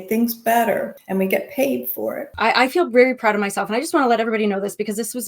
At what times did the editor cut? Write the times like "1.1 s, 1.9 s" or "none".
1.0 s, 2.3 s